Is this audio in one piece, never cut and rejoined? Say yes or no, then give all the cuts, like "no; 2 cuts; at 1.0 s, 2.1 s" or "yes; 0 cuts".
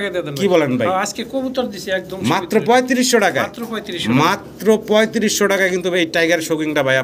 yes; 0 cuts